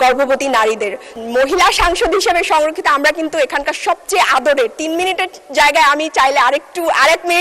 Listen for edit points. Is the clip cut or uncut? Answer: cut